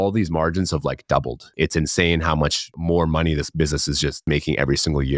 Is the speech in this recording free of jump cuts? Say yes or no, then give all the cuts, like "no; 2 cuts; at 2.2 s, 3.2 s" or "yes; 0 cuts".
no; 3 cuts; at 1.5 s, 2.7 s, 4.2 s